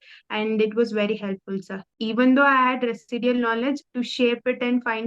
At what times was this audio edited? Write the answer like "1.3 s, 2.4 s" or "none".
2.0 s